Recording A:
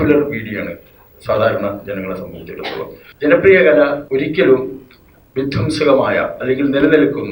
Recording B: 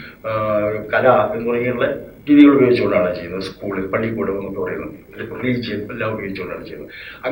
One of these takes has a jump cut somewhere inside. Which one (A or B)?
A